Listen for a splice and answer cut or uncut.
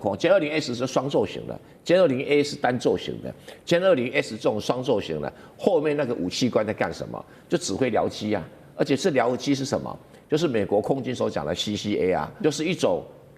cut